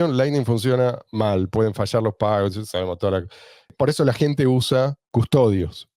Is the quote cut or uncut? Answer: cut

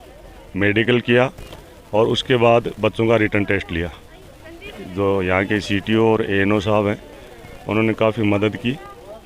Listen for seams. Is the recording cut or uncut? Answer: cut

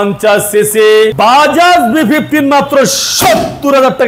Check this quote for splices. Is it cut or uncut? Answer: uncut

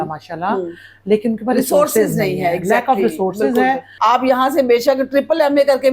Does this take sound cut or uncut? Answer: cut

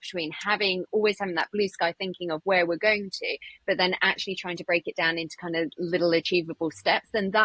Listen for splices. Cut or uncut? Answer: uncut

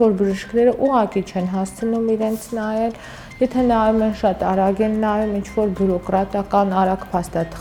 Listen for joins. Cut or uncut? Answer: uncut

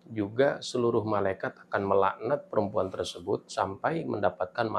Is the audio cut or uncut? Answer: uncut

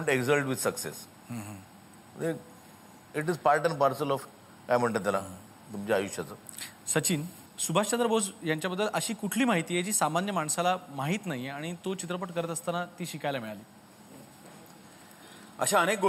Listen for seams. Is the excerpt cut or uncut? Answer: uncut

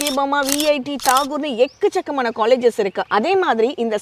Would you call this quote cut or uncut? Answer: uncut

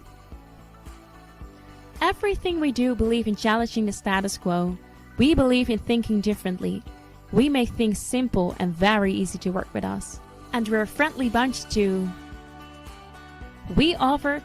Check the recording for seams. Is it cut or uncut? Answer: uncut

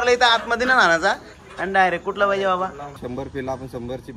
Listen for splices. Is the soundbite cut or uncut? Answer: cut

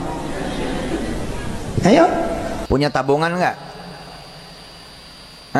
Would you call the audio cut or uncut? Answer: cut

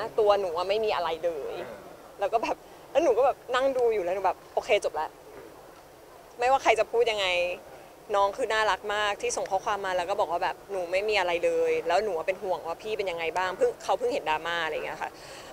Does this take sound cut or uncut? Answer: uncut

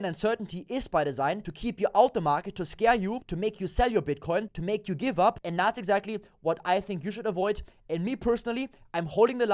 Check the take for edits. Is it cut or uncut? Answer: cut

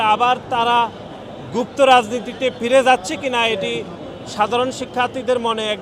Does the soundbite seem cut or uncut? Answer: uncut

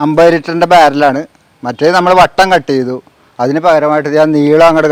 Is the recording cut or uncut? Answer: uncut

